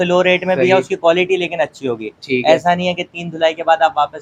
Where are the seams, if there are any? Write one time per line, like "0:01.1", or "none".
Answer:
none